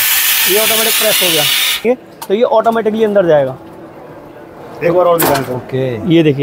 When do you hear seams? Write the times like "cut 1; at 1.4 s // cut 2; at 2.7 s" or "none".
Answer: cut 1; at 1.8 s